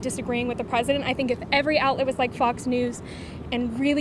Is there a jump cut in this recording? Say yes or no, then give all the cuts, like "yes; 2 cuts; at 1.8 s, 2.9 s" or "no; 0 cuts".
no; 0 cuts